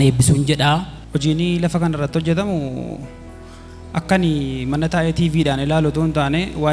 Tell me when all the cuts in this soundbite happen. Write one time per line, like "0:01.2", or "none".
0:01.0

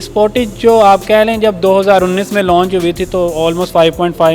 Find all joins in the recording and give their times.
none

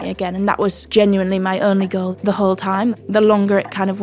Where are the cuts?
0:02.2
0:03.0

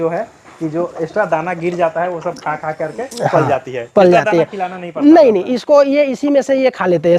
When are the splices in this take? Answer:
none

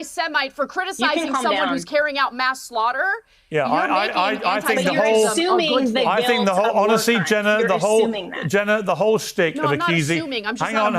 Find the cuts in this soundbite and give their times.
none

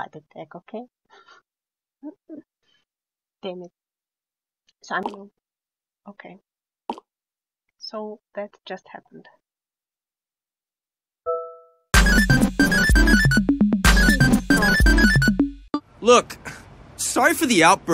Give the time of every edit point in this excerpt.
0:05.0

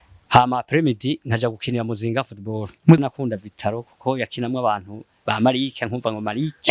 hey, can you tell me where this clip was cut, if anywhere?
0:03.0

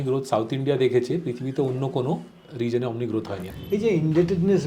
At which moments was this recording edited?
0:03.5

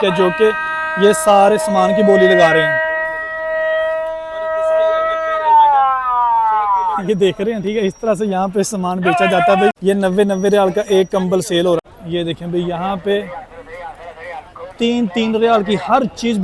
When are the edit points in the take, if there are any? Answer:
0:09.8
0:11.9

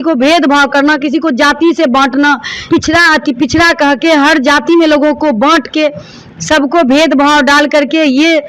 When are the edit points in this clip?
0:02.5

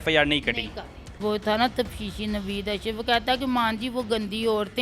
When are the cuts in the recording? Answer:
0:01.2

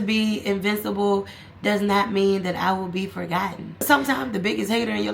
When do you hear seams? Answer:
0:03.8

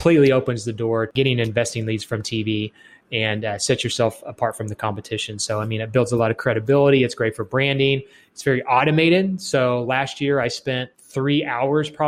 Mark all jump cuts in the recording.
0:11.0

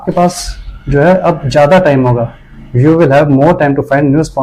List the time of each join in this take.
none

